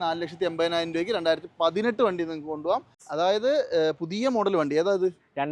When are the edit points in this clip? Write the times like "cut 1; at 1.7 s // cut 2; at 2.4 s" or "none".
cut 1; at 3.0 s